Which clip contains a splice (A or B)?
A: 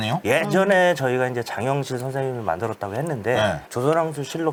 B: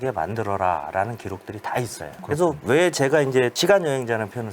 B